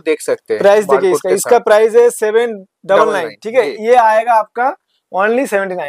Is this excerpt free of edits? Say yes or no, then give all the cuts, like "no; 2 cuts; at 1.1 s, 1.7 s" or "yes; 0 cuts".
yes; 0 cuts